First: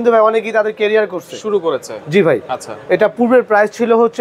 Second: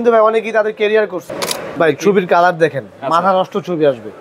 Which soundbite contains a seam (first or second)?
second